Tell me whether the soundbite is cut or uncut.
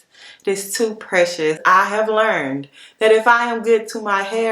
cut